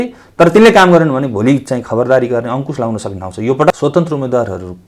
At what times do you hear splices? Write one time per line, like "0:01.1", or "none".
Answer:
0:03.7